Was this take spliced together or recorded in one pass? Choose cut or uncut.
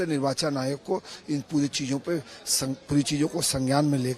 uncut